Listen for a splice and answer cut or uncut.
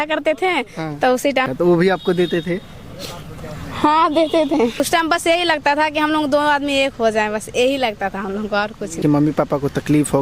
cut